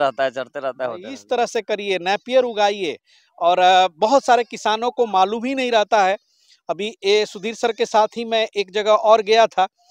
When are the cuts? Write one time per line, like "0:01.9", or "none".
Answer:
none

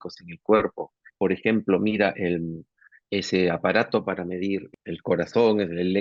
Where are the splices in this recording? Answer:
0:00.9
0:02.8
0:04.7

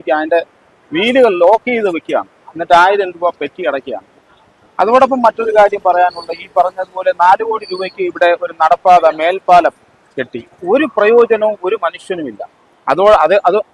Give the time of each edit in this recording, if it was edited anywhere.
0:04.1

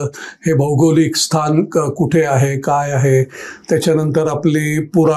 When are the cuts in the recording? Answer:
none

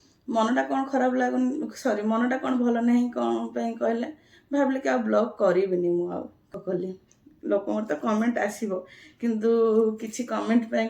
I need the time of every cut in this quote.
0:06.5

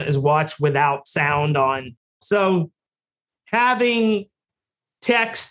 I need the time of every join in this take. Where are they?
0:02.2

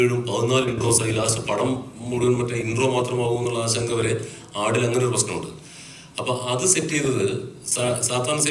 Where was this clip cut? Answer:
none

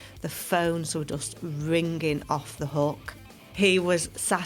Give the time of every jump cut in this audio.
0:03.4

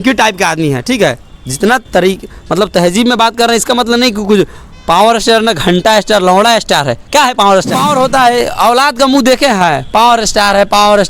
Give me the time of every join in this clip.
0:05.0
0:07.7

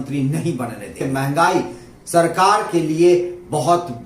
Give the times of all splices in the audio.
0:01.0

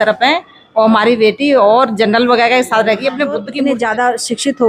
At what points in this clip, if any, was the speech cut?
0:03.5

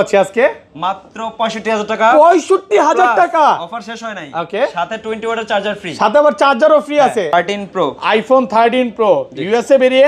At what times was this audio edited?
0:07.3

